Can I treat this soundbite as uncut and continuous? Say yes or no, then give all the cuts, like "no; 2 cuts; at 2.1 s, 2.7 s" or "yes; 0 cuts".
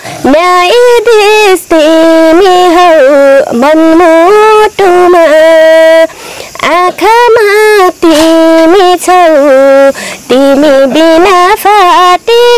yes; 0 cuts